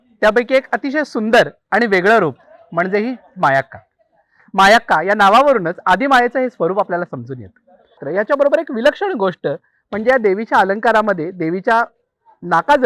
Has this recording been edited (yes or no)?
yes